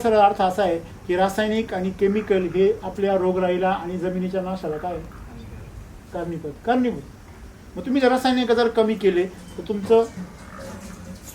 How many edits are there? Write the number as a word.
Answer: zero